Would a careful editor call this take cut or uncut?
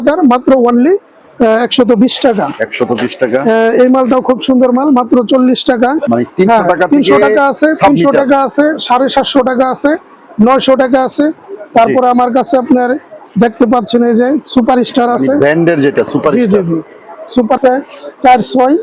cut